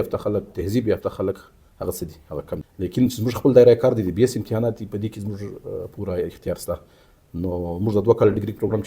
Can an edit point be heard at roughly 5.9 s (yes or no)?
no